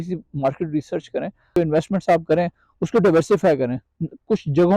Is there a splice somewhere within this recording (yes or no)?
yes